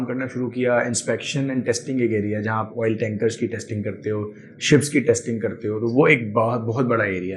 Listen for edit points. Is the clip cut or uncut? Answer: uncut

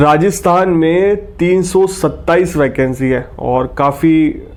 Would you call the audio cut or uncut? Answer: uncut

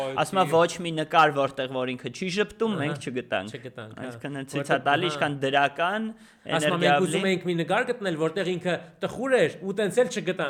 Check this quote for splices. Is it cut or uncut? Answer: uncut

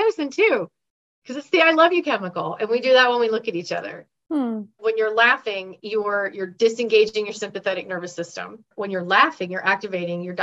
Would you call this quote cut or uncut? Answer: cut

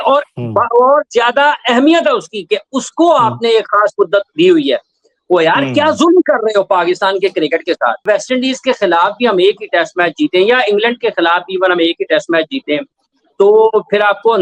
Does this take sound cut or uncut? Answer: cut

